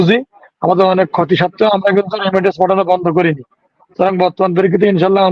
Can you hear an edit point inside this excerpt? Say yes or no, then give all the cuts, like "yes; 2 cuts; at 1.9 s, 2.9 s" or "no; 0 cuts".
no; 0 cuts